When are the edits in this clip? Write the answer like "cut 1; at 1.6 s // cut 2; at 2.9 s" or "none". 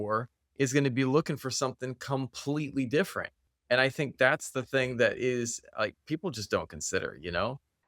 cut 1; at 3.4 s